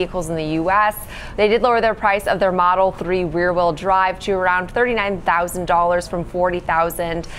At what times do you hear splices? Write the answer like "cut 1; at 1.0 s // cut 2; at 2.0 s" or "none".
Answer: none